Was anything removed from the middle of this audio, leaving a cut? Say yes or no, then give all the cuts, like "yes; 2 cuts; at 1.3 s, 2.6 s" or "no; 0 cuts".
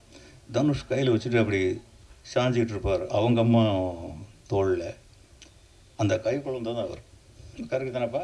no; 0 cuts